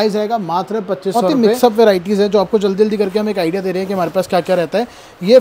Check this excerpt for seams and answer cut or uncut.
cut